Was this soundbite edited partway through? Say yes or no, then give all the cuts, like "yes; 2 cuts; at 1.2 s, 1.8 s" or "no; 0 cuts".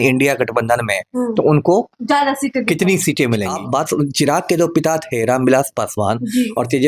yes; 1 cut; at 3.5 s